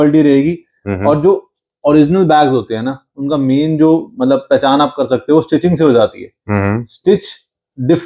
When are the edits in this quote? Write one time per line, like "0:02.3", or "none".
none